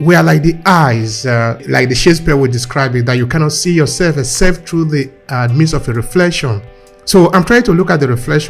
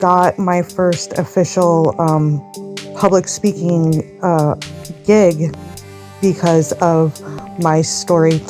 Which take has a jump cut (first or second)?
first